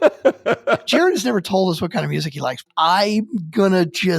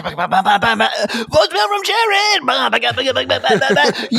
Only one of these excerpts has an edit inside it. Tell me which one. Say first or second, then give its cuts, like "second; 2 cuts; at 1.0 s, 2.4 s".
first; 2 cuts; at 0.8 s, 2.6 s